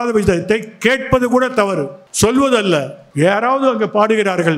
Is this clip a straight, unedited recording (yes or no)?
no